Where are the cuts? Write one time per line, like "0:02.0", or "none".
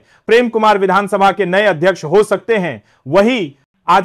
none